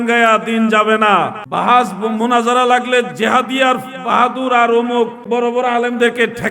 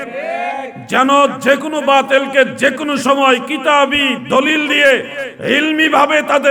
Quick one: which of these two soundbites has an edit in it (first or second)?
first